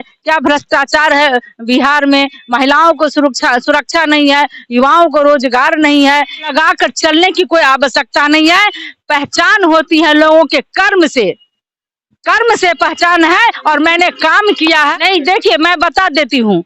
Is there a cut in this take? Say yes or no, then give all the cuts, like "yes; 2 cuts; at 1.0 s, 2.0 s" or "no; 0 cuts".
yes; 2 cuts; at 6.5 s, 14.9 s